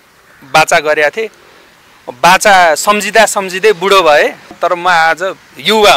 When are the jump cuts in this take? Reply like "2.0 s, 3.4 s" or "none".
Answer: 4.4 s